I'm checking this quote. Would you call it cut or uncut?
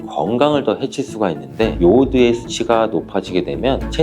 cut